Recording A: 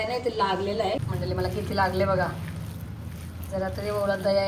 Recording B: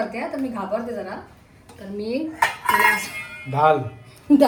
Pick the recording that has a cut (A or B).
A